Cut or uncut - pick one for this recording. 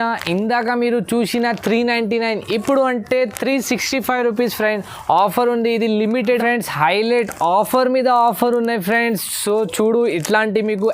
cut